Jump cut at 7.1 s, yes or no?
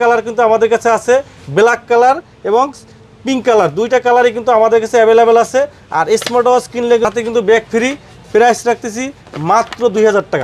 yes